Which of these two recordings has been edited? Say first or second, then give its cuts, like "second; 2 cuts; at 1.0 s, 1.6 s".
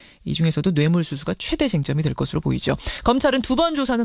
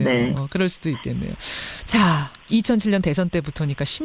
second; 1 cut; at 1.7 s